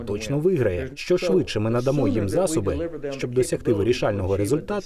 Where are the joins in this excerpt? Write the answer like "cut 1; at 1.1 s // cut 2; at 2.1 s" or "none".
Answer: cut 1; at 0.9 s